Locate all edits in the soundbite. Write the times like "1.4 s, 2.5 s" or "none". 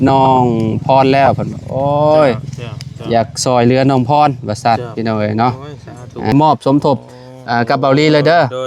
6.3 s